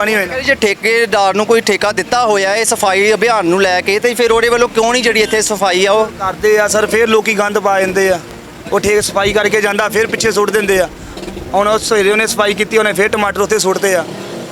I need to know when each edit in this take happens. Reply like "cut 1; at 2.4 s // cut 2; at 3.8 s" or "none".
none